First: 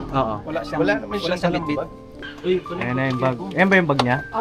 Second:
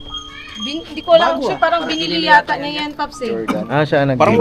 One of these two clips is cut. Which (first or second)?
first